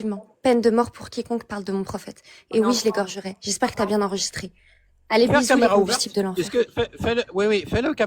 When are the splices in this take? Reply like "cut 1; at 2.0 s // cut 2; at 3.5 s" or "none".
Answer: none